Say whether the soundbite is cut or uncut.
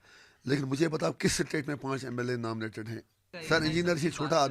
cut